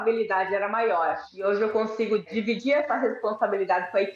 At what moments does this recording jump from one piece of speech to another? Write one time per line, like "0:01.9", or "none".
0:01.3
0:02.3

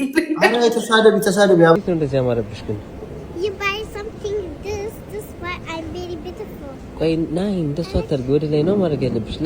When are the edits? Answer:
0:01.8

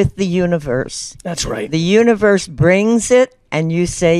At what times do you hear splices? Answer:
none

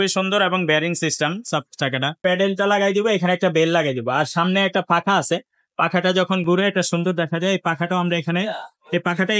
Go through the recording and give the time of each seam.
0:02.2

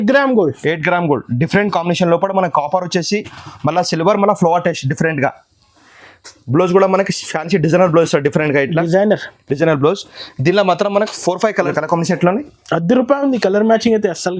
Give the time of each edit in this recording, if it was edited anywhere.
0:11.6

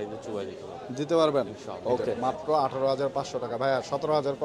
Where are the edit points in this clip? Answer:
0:02.1

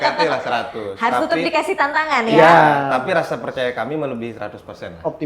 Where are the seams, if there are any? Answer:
none

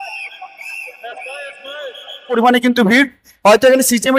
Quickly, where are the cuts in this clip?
0:02.3

